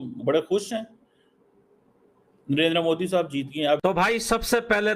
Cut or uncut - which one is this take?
cut